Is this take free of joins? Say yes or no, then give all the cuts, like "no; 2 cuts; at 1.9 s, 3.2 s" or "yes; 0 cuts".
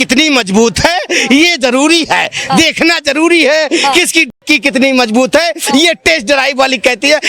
yes; 0 cuts